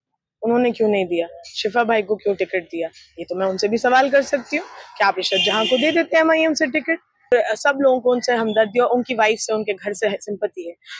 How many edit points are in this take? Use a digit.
1